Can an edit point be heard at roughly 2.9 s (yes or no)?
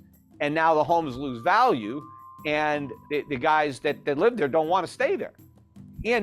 yes